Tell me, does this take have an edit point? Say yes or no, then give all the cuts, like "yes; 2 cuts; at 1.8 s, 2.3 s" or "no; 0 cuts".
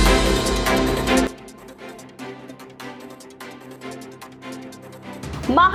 no; 0 cuts